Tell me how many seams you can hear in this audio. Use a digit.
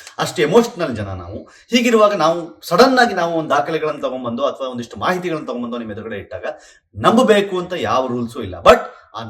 0